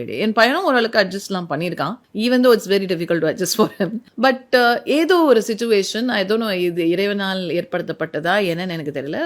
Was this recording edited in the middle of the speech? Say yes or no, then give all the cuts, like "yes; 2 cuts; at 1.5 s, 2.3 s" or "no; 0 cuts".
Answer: yes; 2 cuts; at 2.0 s, 4.0 s